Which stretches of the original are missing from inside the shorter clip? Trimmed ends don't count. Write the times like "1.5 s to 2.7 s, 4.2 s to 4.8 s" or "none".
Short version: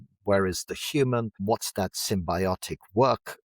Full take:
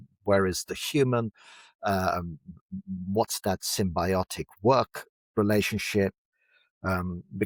1.3 s to 3.0 s